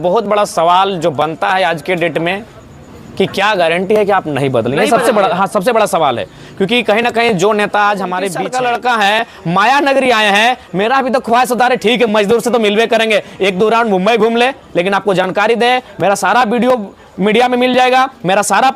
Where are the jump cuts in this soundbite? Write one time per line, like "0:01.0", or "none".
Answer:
0:08.4